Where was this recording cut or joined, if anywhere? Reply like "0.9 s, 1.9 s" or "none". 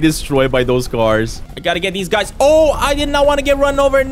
1.4 s